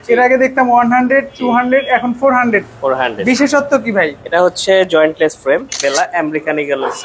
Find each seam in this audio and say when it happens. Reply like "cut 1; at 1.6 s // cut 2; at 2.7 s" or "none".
cut 1; at 5.7 s